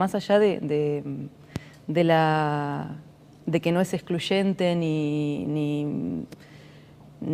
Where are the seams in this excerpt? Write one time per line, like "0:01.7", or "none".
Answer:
none